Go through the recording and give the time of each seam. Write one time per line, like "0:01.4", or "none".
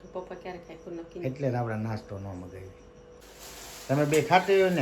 0:03.2